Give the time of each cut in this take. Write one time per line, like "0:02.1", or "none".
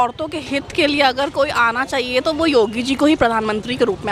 none